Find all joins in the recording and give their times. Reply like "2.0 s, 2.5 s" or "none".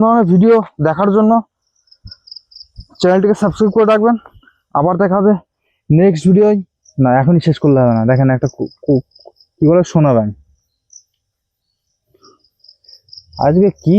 6.8 s